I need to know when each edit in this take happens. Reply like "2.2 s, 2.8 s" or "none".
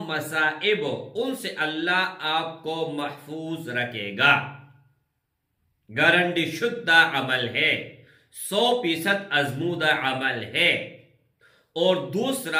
none